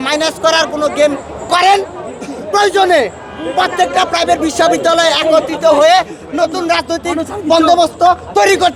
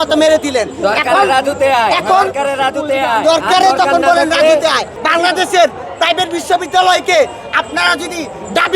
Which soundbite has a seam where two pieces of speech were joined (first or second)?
second